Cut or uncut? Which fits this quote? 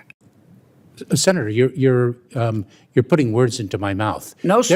uncut